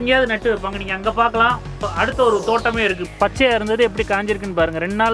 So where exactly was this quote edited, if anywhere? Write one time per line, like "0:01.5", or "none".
0:03.1